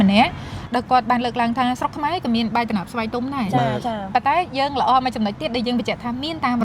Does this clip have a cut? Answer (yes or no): no